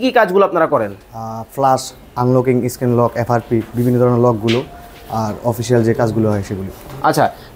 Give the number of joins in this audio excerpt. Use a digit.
0